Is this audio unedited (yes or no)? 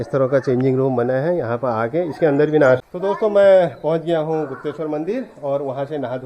no